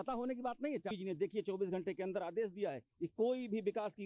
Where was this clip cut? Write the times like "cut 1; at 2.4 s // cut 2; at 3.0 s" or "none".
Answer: cut 1; at 0.9 s